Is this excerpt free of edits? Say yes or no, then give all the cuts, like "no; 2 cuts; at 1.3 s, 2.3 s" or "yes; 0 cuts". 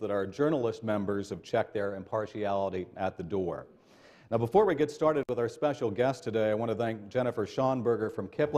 yes; 0 cuts